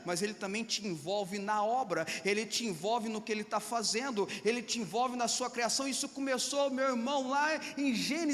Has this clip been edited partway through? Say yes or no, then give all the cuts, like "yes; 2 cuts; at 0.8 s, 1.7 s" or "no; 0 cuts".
no; 0 cuts